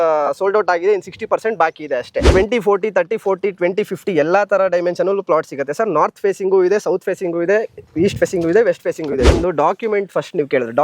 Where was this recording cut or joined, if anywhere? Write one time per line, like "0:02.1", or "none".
0:02.3
0:09.3